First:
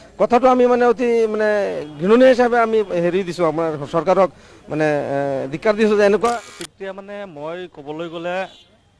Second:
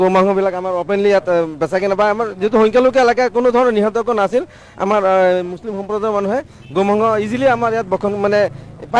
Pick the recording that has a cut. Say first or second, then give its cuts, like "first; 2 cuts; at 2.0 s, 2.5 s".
first; 1 cut; at 6.3 s